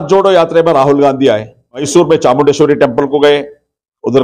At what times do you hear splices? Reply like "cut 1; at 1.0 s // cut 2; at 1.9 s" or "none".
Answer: cut 1; at 1.9 s